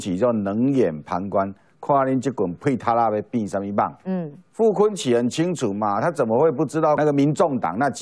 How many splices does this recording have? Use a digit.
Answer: 1